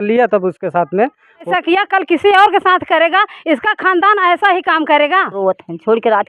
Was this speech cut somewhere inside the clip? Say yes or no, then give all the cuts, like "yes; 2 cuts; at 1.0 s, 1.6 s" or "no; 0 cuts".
yes; 2 cuts; at 1.5 s, 5.3 s